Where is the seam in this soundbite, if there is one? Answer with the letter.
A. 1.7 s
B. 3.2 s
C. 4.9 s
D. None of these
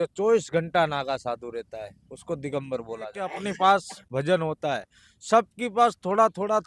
B